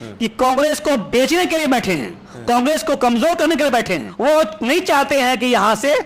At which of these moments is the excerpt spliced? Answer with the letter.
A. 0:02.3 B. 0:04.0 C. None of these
B